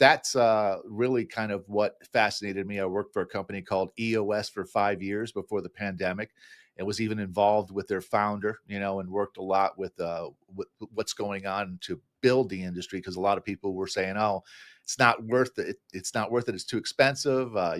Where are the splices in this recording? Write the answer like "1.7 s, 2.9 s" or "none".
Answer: none